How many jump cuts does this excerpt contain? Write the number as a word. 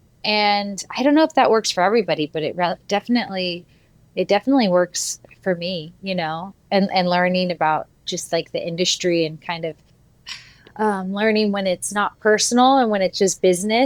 zero